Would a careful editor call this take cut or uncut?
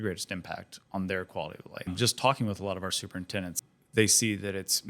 cut